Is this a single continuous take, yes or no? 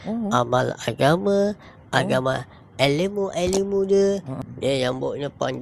no